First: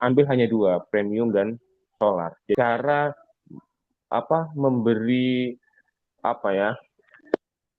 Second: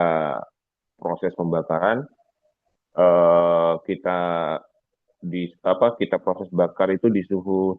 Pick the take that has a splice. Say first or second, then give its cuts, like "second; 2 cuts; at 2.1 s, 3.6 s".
first; 1 cut; at 2.6 s